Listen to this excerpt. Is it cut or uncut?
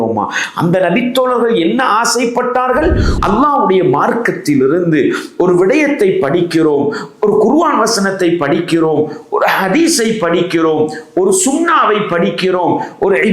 cut